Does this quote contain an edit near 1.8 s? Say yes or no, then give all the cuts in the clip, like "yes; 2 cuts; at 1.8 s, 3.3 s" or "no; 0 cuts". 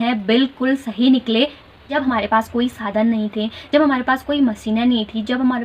yes; 1 cut; at 1.8 s